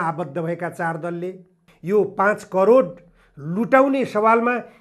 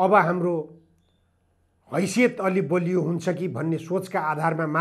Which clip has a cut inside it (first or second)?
first